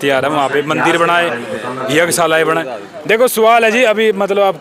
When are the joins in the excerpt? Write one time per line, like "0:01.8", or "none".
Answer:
none